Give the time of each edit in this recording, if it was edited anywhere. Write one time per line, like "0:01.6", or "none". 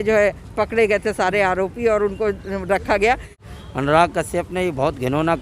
0:03.4